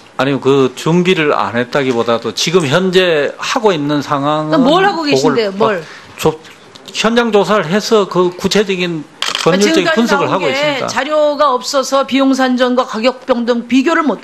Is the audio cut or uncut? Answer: cut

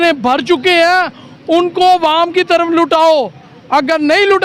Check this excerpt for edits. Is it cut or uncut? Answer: uncut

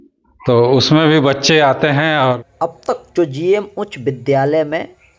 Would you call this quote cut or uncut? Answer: cut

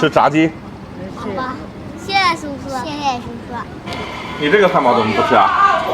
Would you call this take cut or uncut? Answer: cut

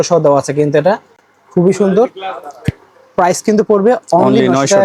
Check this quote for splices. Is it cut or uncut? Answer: uncut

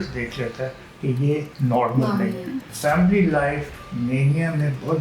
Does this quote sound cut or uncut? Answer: cut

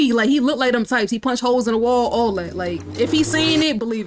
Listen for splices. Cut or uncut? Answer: cut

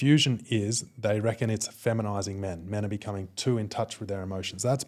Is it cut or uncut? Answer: uncut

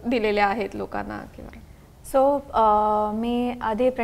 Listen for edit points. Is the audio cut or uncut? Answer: uncut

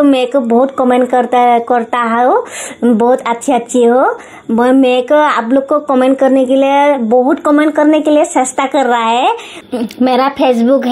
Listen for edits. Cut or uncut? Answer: cut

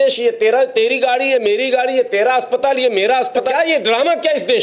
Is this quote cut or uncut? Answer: cut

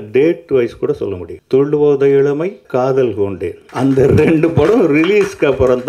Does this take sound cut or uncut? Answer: cut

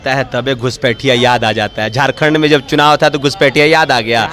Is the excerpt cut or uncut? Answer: uncut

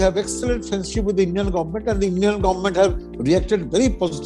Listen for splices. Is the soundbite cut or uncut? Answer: uncut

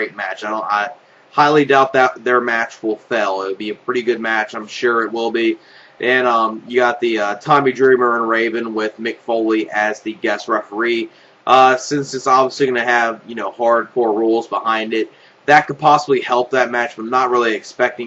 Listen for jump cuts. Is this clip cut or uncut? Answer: cut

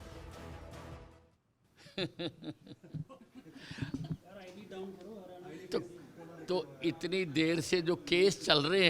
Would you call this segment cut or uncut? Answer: cut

